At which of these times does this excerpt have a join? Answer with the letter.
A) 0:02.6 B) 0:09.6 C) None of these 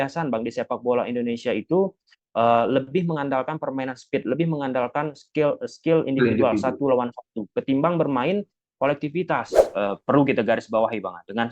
B